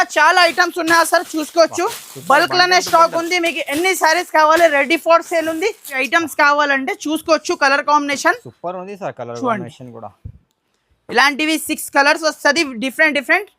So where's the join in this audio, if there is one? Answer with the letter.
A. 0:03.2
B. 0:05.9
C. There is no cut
B